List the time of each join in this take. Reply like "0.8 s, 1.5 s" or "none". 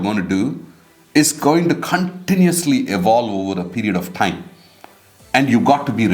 none